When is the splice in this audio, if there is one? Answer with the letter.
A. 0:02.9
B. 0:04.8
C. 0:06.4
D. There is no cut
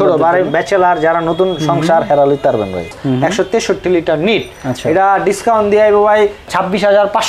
A